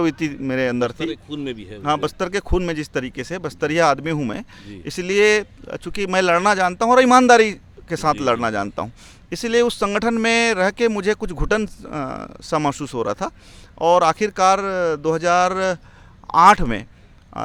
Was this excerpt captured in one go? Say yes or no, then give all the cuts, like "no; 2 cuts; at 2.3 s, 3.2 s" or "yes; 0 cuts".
yes; 0 cuts